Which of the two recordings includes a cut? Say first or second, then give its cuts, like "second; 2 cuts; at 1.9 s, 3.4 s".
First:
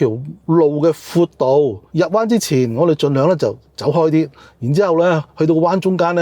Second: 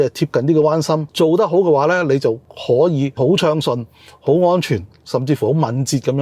second; 3 cuts; at 1.1 s, 2.5 s, 3.2 s